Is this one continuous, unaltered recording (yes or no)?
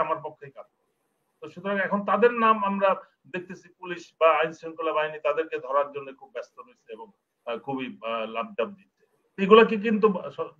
yes